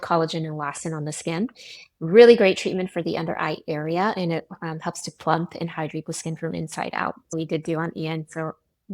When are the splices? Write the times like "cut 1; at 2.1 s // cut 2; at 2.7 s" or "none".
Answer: cut 1; at 7.3 s